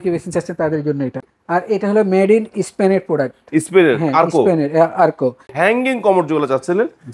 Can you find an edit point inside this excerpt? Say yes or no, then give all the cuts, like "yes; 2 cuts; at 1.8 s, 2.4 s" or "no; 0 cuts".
yes; 2 cuts; at 1.2 s, 5.5 s